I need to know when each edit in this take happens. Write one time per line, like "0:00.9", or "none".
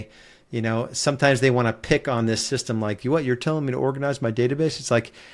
none